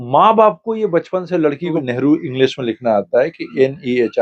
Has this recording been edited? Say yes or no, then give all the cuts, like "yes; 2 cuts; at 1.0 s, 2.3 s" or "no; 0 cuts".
yes; 1 cut; at 1.8 s